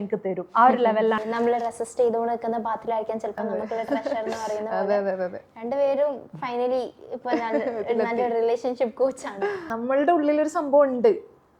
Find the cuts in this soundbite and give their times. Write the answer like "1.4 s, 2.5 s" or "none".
1.2 s, 9.7 s